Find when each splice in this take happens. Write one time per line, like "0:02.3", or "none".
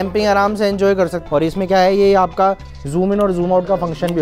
0:01.2